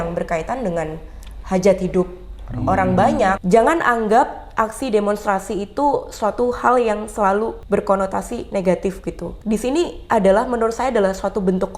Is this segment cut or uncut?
cut